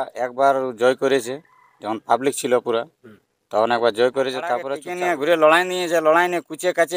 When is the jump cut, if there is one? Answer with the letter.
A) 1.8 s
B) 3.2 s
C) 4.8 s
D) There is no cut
C